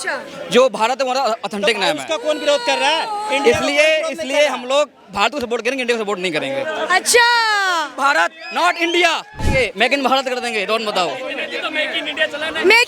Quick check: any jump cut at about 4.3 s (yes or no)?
no